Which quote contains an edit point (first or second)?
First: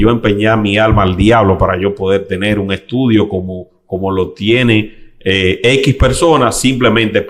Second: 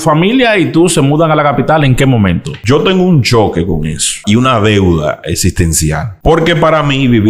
second